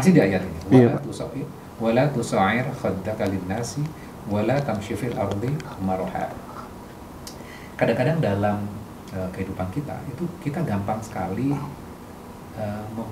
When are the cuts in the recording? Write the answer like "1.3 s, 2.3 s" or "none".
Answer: none

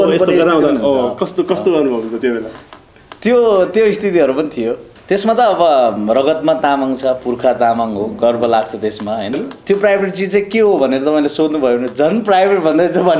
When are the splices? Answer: 5.1 s, 9.5 s

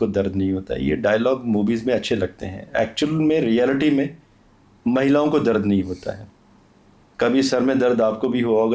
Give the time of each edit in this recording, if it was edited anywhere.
none

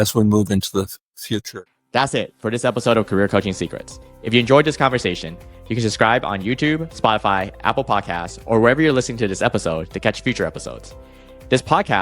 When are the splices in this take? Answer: 1.5 s

